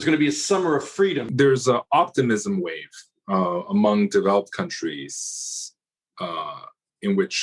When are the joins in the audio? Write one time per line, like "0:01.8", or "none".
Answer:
0:01.2